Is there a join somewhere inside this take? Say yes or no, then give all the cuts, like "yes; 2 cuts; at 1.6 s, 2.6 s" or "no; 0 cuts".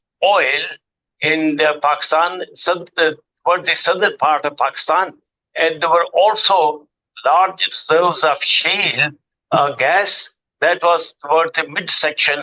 no; 0 cuts